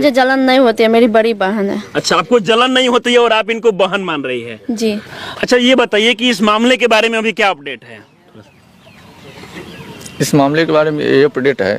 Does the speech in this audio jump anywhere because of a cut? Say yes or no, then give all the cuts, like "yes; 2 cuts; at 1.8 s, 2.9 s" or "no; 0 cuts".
no; 0 cuts